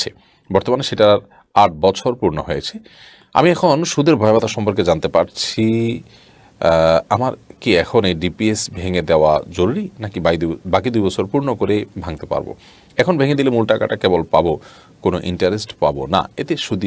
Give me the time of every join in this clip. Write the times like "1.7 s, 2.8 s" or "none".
none